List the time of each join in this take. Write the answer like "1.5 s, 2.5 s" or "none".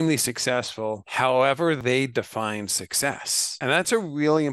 1.0 s, 1.8 s, 3.8 s